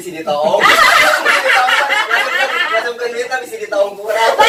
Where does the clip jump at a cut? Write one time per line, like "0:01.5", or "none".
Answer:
none